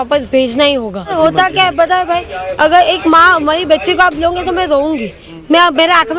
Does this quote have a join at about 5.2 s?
no; 1 cut; at 1.1 s

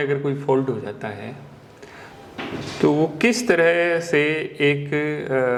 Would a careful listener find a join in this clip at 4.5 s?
no; 0 cuts

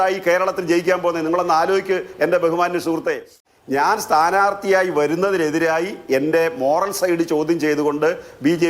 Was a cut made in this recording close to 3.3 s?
yes; 1 cut; at 3.3 s

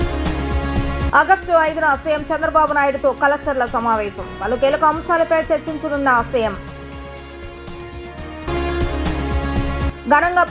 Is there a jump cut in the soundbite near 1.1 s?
yes; 1 cut; at 1.1 s

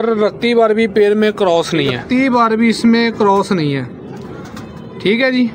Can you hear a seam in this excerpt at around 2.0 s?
yes; 1 cut; at 2.0 s

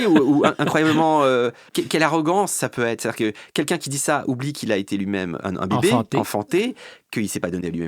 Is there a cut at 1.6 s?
yes; 2 cuts; at 1.6 s, 5.4 s

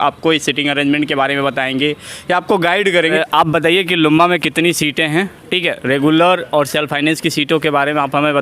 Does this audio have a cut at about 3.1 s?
yes; 1 cut; at 3.1 s

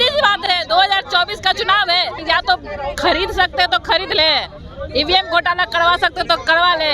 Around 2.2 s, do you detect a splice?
yes; 1 cut; at 2.2 s

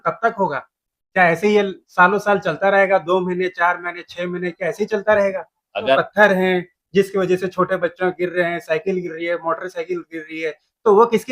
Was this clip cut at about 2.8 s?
no; 1 cut; at 6.0 s

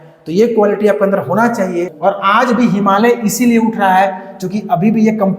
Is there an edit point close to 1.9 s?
yes; 1 cut; at 1.9 s

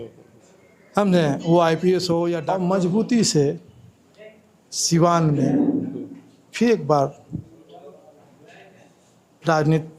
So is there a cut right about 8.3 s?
no; 1 cut; at 2.5 s

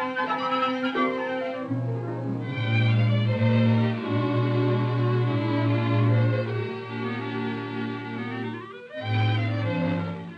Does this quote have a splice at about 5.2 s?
yes; 1 cut; at 5.2 s

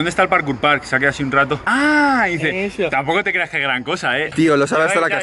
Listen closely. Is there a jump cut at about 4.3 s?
yes; 1 cut; at 4.3 s

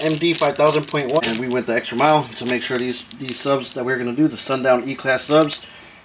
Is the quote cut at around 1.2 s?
yes; 1 cut; at 1.2 s

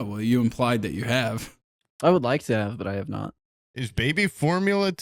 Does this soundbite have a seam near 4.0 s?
yes; 1 cut; at 4.0 s

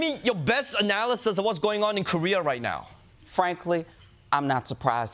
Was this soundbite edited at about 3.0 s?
yes; 1 cut; at 3.0 s

